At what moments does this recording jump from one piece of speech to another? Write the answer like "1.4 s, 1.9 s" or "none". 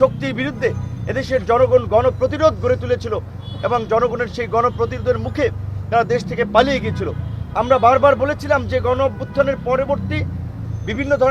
none